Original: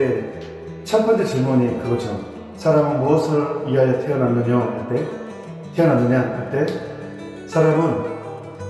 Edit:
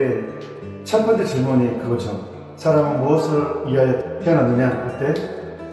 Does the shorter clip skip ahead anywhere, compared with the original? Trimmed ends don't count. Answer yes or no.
yes